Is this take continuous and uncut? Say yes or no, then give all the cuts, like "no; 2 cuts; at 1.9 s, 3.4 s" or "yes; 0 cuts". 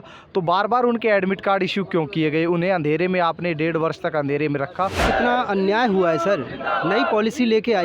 no; 1 cut; at 5.0 s